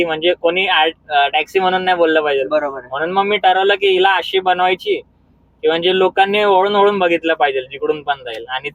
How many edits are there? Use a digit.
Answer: 0